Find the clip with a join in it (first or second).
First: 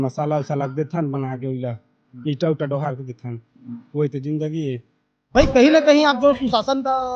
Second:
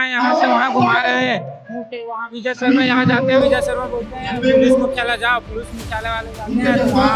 first